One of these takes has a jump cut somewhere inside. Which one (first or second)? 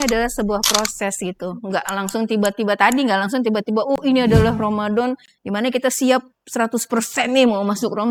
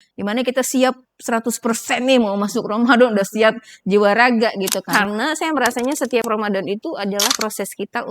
second